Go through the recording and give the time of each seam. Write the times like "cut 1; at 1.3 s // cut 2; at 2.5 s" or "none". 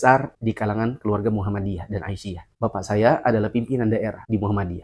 none